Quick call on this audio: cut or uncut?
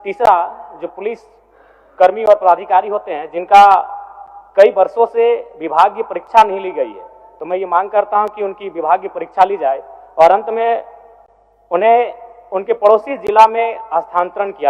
uncut